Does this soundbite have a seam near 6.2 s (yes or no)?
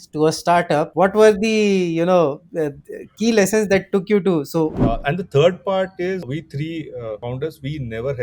yes